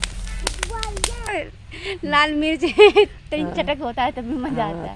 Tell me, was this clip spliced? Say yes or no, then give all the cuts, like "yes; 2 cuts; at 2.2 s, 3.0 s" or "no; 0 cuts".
yes; 1 cut; at 1.3 s